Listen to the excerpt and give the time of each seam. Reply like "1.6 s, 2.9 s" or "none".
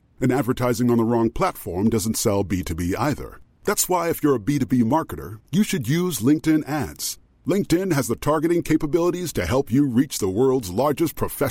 none